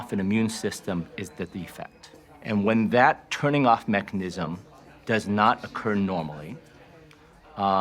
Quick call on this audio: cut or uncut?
uncut